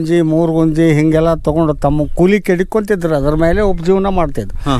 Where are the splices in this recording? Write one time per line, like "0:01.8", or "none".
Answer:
none